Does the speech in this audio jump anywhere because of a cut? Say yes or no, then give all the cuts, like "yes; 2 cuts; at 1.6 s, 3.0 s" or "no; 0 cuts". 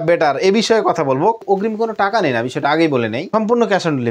yes; 2 cuts; at 1.4 s, 3.2 s